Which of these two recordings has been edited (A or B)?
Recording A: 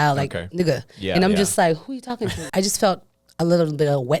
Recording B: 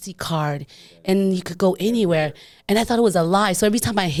A